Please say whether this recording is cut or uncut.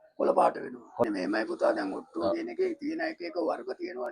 cut